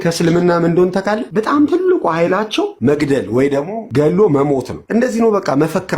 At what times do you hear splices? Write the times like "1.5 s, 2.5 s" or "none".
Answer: 1.2 s, 2.7 s, 3.9 s, 4.8 s